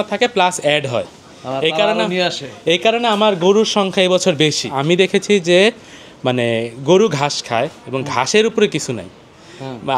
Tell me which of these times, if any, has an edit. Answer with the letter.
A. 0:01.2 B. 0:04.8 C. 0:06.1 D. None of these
B